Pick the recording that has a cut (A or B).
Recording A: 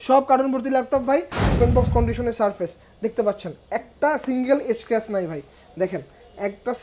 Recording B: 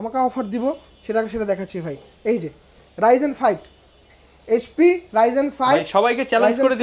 A